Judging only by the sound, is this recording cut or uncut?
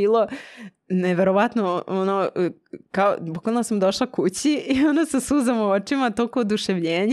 uncut